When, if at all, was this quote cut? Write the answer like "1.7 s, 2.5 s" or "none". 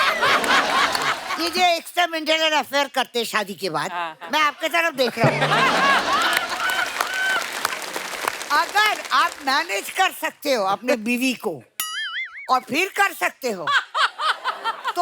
1.3 s